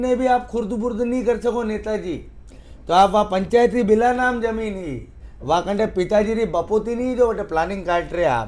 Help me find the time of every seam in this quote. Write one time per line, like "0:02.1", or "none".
none